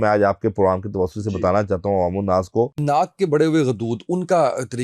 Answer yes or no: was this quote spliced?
yes